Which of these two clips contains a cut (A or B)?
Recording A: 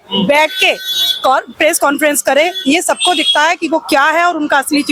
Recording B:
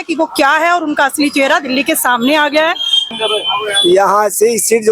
B